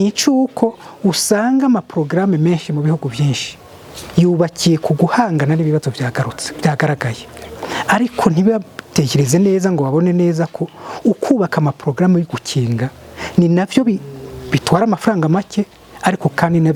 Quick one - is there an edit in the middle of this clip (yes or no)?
no